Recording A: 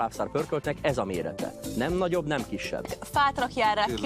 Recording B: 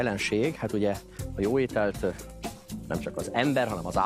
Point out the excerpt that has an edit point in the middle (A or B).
A